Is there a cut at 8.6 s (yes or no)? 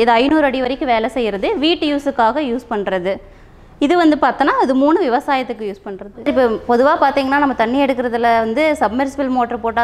no